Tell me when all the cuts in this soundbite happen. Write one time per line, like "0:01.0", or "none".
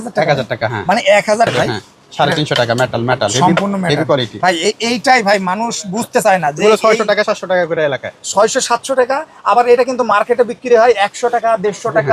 0:01.5